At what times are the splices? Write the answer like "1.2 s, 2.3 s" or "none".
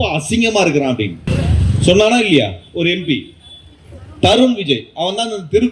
1.2 s